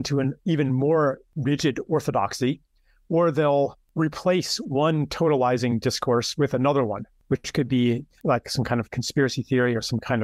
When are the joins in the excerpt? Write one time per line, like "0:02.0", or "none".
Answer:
0:01.3
0:03.8
0:07.1
0:08.1